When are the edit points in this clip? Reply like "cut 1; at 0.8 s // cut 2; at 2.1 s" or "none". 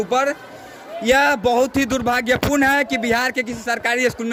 none